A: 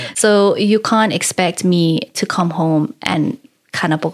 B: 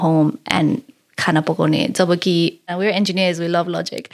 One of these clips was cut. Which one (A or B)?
B